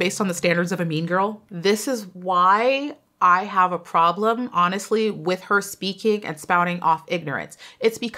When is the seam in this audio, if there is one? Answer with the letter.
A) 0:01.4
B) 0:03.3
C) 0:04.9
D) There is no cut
A